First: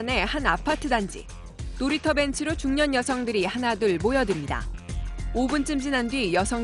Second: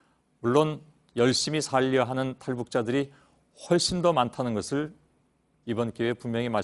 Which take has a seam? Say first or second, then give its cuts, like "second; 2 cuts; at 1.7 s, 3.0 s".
second; 1 cut; at 1.8 s